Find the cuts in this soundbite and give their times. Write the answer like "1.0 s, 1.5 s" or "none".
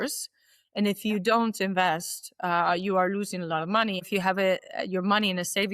4.0 s

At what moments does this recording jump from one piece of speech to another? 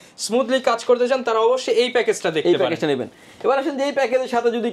none

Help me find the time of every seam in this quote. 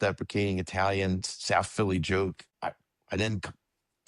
2.4 s

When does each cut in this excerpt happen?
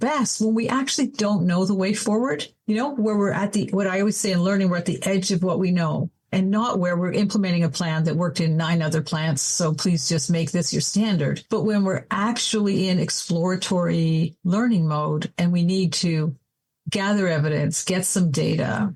none

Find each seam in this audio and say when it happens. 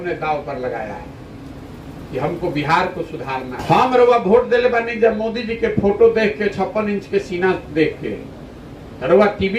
3.6 s

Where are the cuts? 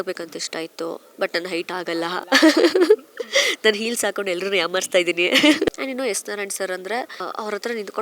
5.7 s, 7.2 s

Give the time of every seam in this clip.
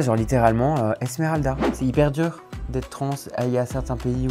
1.7 s

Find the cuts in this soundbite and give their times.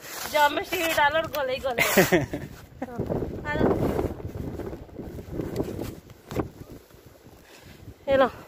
3.0 s

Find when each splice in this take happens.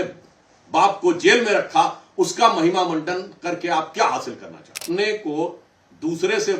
4.8 s

